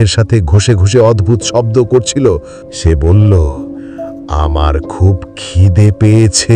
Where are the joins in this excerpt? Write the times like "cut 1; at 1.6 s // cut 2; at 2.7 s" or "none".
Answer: cut 1; at 2.6 s